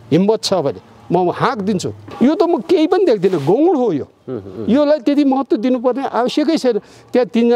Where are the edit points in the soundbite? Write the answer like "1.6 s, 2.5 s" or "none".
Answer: 2.1 s